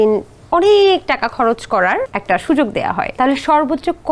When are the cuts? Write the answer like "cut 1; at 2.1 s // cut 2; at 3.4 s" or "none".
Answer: cut 1; at 2.1 s // cut 2; at 3.1 s